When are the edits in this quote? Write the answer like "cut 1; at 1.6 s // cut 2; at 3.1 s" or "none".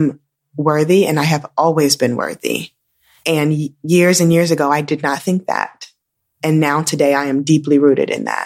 none